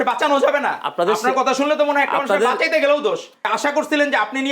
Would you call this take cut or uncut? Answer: cut